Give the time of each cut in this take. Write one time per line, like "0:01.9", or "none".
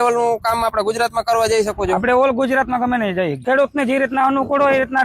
0:03.4